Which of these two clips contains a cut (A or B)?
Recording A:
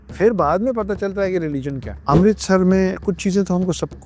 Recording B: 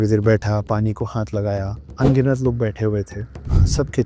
A